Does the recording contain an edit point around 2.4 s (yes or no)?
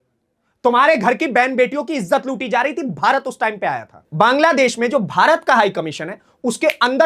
no